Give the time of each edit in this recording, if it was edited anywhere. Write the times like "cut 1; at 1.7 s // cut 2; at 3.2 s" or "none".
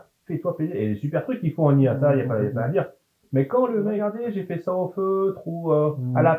cut 1; at 4.0 s